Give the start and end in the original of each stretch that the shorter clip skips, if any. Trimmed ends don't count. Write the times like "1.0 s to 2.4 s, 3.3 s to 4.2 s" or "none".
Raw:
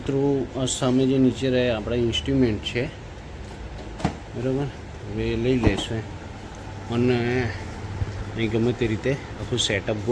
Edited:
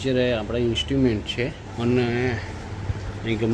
3.0 s to 6.8 s